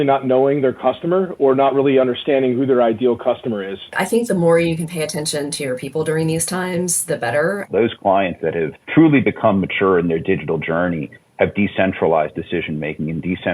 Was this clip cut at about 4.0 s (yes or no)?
yes